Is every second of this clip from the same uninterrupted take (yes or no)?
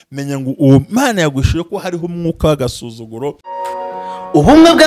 no